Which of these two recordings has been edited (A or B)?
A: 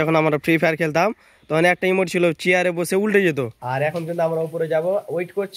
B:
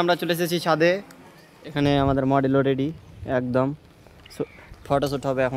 A